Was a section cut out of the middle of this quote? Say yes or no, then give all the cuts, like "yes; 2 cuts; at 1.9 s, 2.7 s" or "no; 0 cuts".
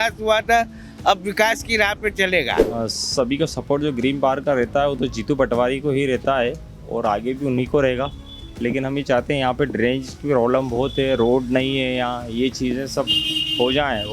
yes; 1 cut; at 2.7 s